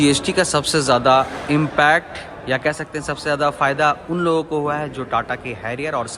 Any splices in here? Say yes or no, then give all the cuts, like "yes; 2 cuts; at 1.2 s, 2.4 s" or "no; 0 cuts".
no; 0 cuts